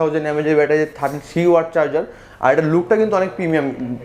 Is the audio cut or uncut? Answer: uncut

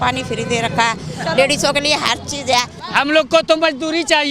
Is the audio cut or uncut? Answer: cut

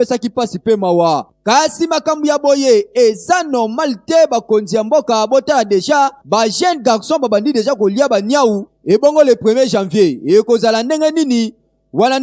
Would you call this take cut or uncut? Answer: uncut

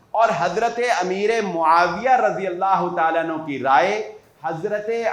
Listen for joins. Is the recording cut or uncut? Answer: uncut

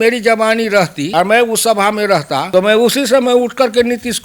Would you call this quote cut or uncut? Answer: cut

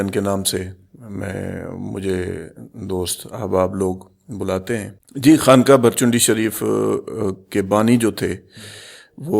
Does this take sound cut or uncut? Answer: cut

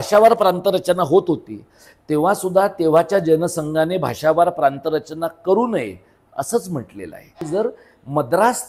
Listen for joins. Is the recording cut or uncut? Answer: cut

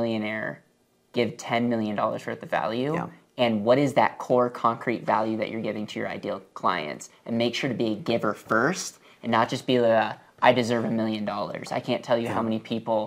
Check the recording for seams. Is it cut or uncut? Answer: uncut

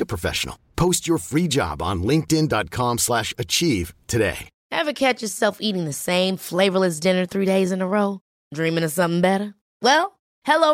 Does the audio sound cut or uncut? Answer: uncut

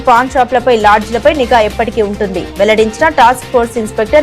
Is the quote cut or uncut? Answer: uncut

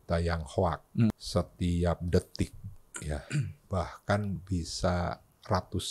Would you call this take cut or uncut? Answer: cut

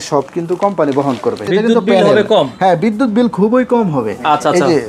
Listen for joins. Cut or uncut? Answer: cut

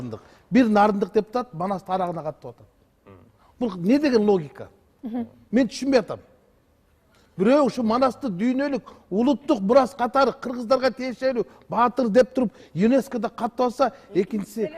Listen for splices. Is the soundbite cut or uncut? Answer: uncut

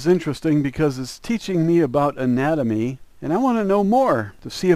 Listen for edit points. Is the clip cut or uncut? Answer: cut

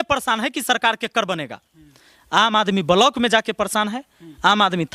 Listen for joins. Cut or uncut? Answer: uncut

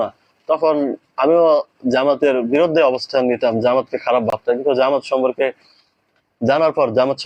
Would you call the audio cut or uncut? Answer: uncut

